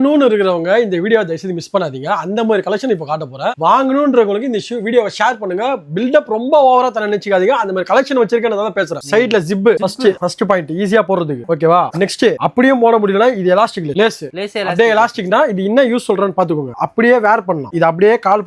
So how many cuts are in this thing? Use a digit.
0